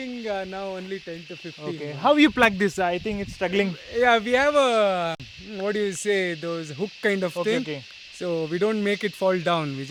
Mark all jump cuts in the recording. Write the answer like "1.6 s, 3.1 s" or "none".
none